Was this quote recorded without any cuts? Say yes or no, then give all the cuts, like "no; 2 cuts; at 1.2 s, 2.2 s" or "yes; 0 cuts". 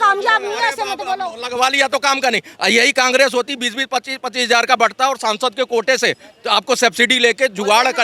yes; 0 cuts